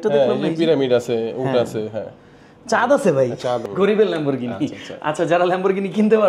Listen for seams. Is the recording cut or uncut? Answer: cut